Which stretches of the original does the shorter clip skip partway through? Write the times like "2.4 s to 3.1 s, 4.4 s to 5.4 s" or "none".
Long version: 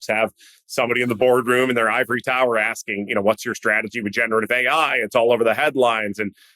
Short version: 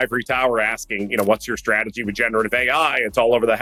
none